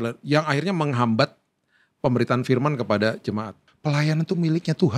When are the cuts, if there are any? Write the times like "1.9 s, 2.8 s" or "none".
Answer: 3.6 s